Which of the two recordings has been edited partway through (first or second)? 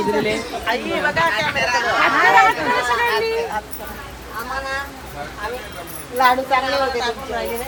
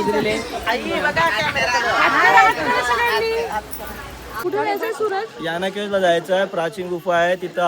second